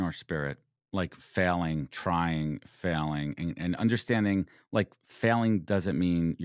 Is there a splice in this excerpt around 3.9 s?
no; 0 cuts

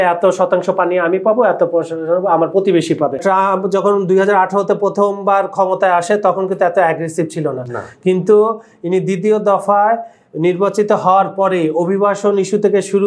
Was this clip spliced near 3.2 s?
yes; 1 cut; at 3.2 s

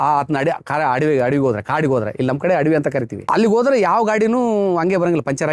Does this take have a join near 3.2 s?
yes; 1 cut; at 3.2 s

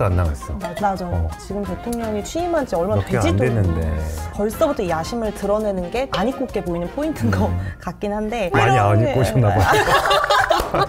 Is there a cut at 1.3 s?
yes; 1 cut; at 1.3 s

